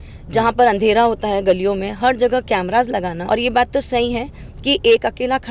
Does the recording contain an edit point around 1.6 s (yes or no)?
no